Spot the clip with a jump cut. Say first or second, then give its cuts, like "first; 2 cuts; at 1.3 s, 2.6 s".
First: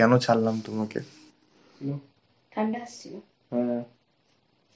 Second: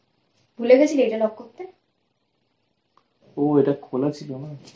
first; 1 cut; at 1.8 s